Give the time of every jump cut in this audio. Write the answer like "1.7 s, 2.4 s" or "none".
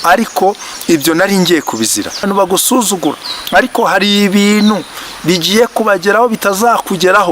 2.2 s